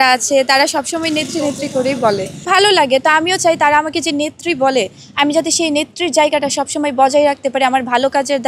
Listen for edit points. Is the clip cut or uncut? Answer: cut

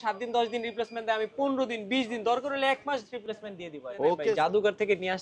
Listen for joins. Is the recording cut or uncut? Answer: cut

